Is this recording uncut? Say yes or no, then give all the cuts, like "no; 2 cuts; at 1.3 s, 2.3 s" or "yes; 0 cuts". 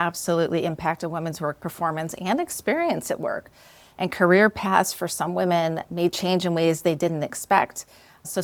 yes; 0 cuts